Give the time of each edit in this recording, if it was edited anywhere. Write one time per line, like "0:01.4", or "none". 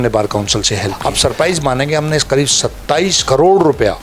0:00.9
0:03.2